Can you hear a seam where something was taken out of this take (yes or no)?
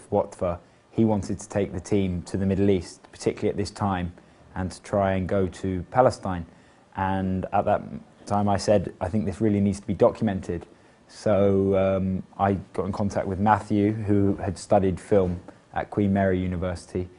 yes